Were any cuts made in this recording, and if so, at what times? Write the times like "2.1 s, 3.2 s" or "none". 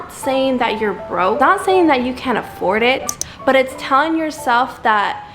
1.4 s